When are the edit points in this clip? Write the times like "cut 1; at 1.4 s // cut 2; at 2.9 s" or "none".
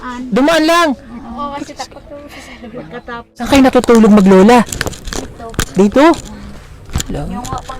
cut 1; at 3.5 s